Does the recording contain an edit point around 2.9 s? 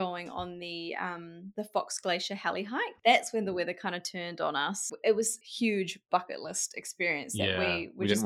yes; 4 cuts; at 1.4 s, 2.9 s, 4.8 s, 5.4 s

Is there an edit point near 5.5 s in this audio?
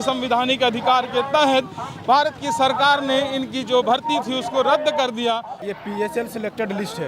yes; 1 cut; at 5.5 s

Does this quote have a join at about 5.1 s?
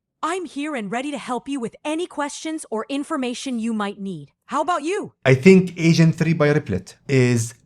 yes; 1 cut; at 5.1 s

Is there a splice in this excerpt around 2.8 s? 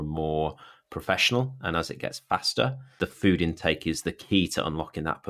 yes; 1 cut; at 2.8 s

